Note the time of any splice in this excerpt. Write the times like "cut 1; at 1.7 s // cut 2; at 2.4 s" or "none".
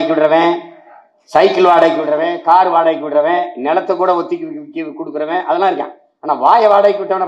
none

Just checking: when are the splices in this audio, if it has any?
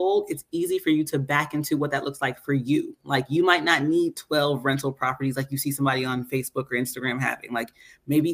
none

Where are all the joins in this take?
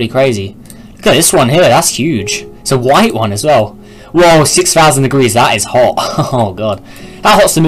cut 1; at 3.2 s

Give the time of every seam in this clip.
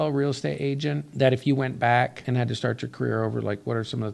cut 1; at 1.1 s // cut 2; at 2.2 s

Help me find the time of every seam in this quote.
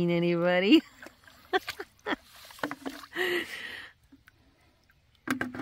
none

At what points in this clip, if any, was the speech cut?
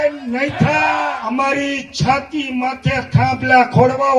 cut 1; at 1.1 s

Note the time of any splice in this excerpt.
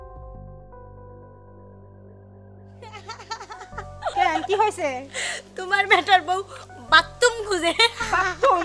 cut 1; at 4.2 s

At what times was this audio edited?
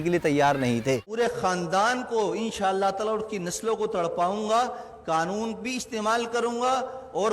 cut 1; at 1.1 s

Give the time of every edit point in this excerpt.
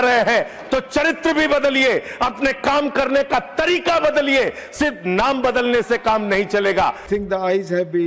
cut 1; at 7.0 s

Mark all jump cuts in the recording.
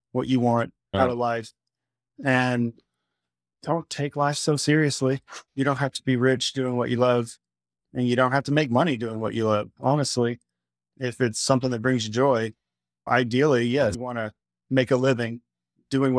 cut 1; at 0.9 s // cut 2; at 5.3 s

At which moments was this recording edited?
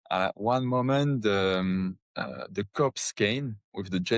cut 1; at 2.1 s

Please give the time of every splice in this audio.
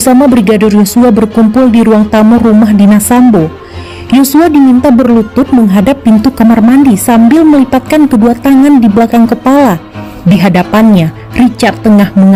none

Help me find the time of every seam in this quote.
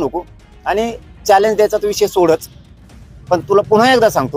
none

